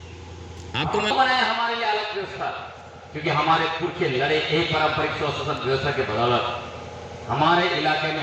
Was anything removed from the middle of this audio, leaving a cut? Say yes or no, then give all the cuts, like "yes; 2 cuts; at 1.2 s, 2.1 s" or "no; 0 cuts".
yes; 1 cut; at 1.1 s